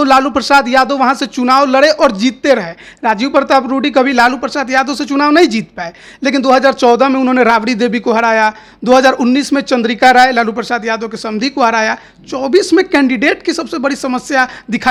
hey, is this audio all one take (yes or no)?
yes